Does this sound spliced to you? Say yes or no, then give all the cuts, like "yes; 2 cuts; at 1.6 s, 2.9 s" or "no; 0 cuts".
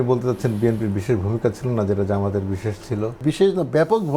yes; 1 cut; at 3.2 s